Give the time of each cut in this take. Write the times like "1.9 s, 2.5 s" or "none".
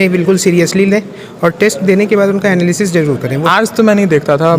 3.4 s